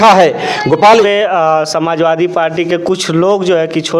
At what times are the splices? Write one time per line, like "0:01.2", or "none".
0:01.1